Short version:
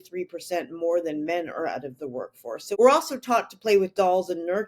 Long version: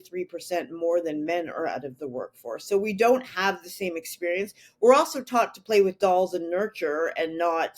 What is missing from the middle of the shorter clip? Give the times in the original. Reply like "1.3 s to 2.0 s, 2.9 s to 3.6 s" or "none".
2.7 s to 4.8 s